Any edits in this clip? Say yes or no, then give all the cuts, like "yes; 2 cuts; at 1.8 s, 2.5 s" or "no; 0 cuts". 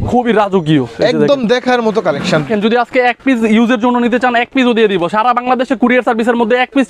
yes; 1 cut; at 2.4 s